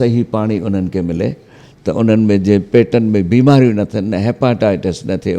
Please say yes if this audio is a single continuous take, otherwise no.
yes